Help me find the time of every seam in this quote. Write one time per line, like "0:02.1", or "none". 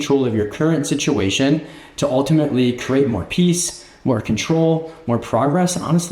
none